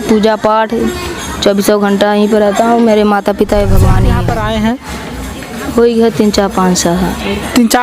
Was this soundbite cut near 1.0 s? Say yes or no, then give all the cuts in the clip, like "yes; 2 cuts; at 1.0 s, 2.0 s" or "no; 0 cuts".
no; 1 cut; at 4.1 s